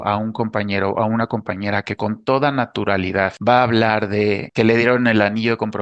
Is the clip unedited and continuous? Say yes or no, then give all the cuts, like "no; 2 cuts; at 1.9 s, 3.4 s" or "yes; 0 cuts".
no; 2 cuts; at 3.4 s, 4.5 s